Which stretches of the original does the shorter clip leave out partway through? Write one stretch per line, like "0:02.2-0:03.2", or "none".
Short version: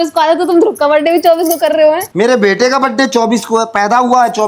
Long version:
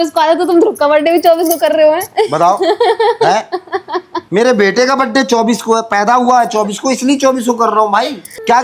0:02.1-0:04.2